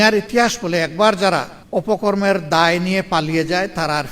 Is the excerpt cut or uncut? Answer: cut